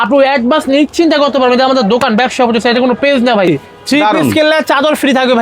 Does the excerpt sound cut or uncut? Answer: cut